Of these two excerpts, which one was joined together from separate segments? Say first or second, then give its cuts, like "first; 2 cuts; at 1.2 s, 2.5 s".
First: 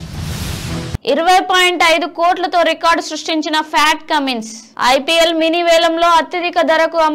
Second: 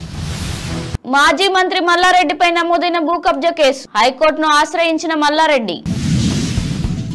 second; 1 cut; at 1.0 s